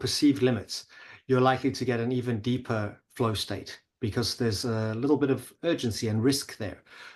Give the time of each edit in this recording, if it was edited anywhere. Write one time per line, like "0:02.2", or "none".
none